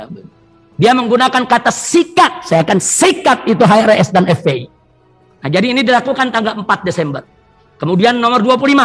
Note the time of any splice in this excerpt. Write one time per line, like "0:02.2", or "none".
none